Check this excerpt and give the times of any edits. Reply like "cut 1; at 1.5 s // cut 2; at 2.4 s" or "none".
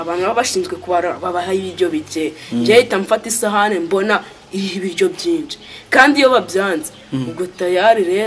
none